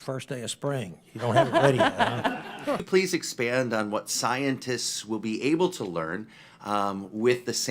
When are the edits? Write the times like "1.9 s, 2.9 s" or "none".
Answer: 2.8 s